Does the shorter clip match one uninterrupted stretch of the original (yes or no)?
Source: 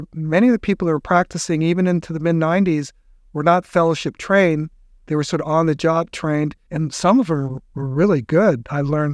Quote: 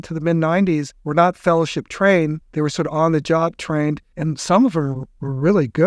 no